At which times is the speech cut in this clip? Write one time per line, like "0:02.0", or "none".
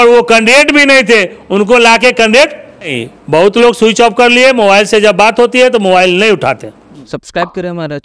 0:03.1
0:06.9

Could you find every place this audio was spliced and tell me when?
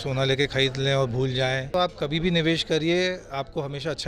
0:01.7

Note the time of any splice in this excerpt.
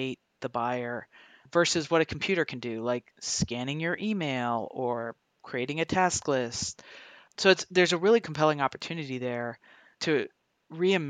0:10.0

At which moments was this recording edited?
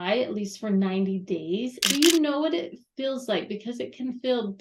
0:01.8

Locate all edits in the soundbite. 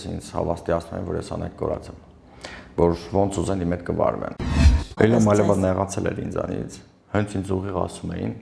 0:04.7

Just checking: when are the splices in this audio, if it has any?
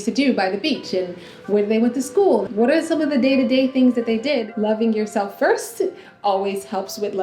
0:02.5
0:04.5

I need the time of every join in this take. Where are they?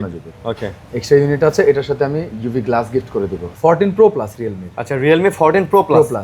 0:03.4

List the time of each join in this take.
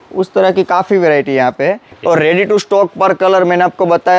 0:01.9

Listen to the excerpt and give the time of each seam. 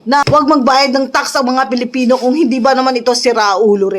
0:02.6

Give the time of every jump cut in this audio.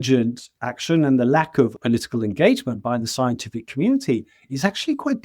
0:01.8

